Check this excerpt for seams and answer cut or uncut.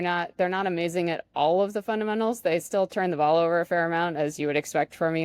uncut